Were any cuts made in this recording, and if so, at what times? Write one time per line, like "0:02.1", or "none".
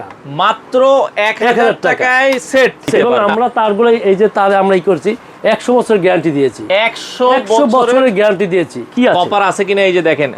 0:03.1
0:08.8